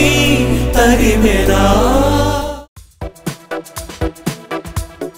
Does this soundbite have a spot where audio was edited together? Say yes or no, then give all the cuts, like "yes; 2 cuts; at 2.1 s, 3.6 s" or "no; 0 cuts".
no; 0 cuts